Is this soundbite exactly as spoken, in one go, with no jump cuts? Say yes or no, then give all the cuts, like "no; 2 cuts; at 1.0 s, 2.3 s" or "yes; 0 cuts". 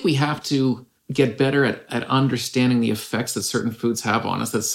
no; 1 cut; at 0.9 s